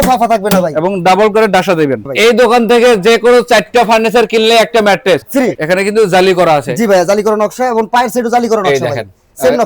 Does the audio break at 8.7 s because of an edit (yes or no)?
no